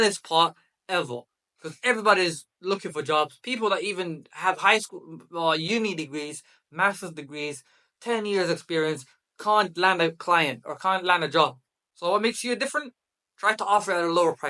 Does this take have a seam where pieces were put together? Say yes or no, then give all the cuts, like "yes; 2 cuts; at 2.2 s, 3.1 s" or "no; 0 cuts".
no; 0 cuts